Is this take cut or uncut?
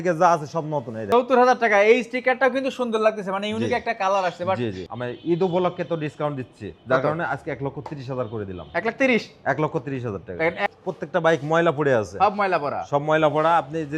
cut